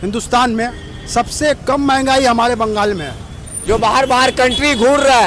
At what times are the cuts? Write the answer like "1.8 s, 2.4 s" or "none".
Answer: 3.5 s